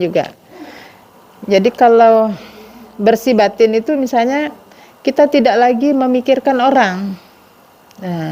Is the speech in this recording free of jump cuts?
yes; 0 cuts

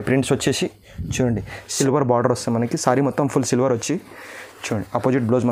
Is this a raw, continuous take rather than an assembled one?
no; 1 cut; at 1.7 s

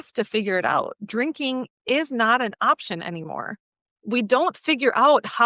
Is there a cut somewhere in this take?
yes; 1 cut; at 3.9 s

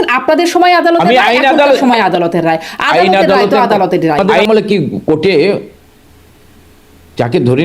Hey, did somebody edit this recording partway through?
yes; 1 cut; at 4.3 s

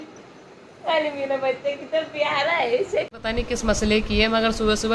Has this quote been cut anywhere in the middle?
yes; 1 cut; at 3.1 s

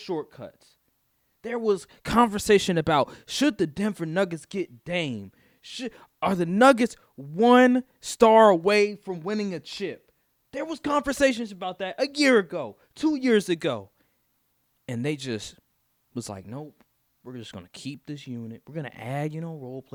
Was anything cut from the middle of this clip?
no; 0 cuts

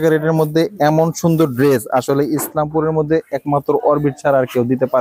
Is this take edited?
no; 0 cuts

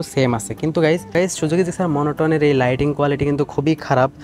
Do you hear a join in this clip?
yes; 1 cut; at 1.1 s

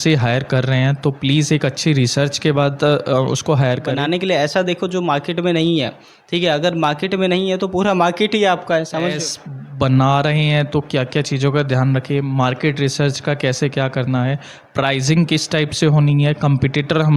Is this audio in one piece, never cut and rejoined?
no; 2 cuts; at 3.9 s, 9.1 s

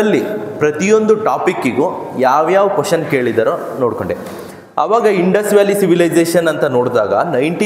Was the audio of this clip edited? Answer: no; 0 cuts

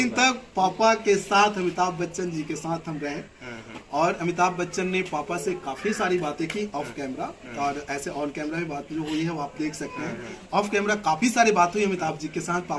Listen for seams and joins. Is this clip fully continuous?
yes; 0 cuts

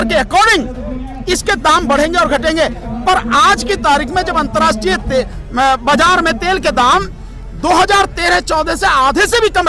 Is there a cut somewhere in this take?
no; 0 cuts

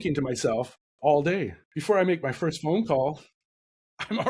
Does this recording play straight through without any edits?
no; 1 cut; at 1.7 s

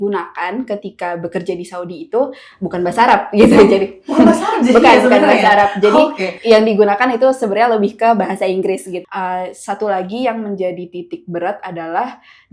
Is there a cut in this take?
yes; 1 cut; at 8.9 s

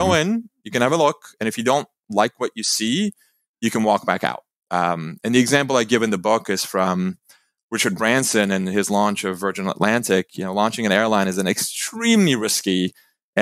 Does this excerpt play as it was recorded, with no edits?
yes; 0 cuts

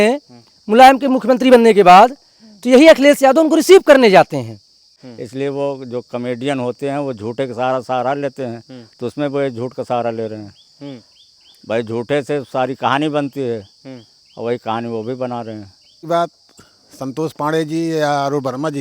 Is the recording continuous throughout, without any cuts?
no; 2 cuts; at 5.0 s, 16.0 s

